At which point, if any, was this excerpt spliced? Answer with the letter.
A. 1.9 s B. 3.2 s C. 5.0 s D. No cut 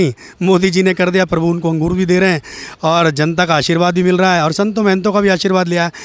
D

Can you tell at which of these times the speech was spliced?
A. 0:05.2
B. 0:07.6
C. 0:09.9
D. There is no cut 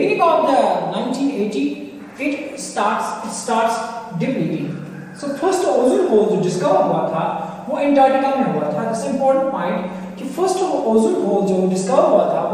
D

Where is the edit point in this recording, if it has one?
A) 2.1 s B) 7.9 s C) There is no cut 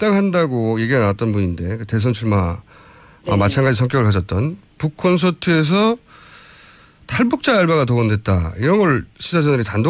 A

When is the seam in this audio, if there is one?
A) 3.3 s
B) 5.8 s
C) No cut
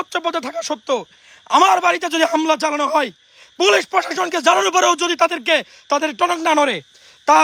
C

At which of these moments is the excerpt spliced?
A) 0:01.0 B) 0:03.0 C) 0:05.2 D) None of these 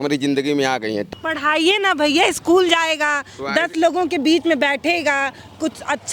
A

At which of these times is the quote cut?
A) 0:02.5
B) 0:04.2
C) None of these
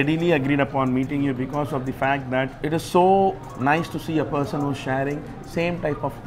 A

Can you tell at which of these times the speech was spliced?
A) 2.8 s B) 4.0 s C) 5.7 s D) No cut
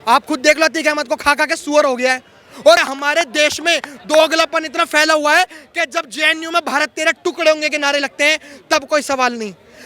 A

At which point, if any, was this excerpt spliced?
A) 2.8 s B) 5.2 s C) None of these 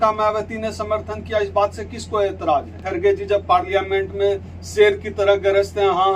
A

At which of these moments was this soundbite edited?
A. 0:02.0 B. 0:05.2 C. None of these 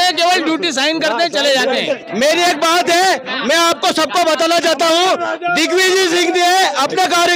A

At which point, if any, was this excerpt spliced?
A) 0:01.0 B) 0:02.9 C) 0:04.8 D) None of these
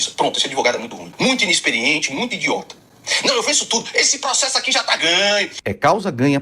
A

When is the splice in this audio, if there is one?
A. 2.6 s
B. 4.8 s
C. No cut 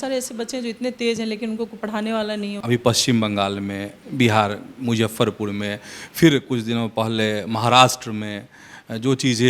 A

